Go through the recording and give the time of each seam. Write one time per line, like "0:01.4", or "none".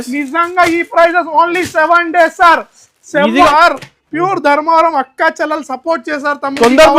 0:03.5